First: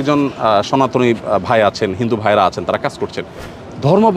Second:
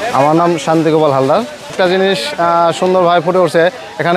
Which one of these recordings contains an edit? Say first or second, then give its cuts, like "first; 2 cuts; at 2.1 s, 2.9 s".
second; 1 cut; at 1.7 s